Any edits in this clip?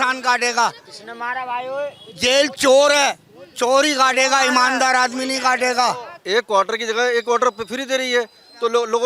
yes; 1 cut; at 6.1 s

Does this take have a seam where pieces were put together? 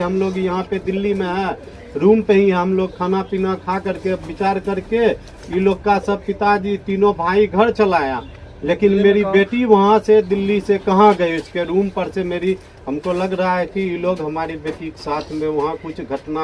no; 0 cuts

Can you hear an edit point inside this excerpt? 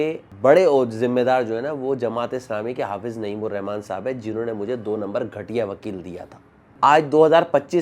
yes; 1 cut; at 6.7 s

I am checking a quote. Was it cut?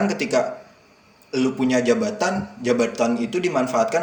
no; 0 cuts

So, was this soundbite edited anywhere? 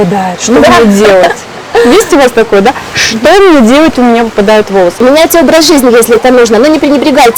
yes; 1 cut; at 4.9 s

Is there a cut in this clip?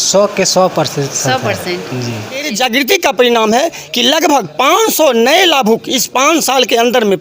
yes; 1 cut; at 2.5 s

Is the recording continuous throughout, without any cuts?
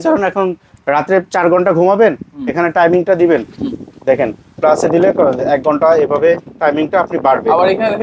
yes; 0 cuts

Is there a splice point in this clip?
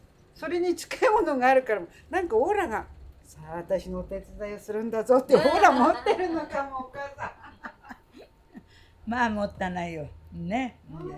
no; 0 cuts

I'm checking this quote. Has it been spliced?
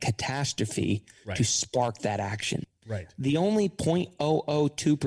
yes; 1 cut; at 2.8 s

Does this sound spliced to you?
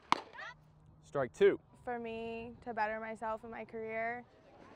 no; 0 cuts

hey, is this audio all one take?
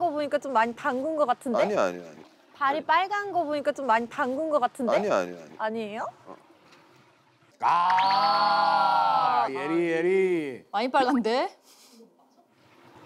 yes; 0 cuts

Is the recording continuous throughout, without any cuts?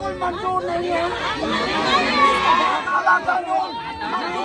no; 1 cut; at 2.8 s

